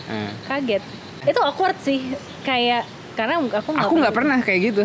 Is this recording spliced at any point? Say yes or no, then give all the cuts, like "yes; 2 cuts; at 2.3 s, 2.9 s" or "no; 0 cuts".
yes; 1 cut; at 1.2 s